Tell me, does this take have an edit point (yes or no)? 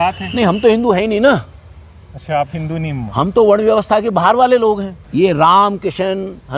yes